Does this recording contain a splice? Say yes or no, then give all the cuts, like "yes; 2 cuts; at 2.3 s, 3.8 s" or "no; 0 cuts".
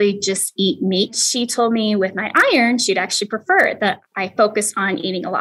yes; 2 cuts; at 1.2 s, 4.0 s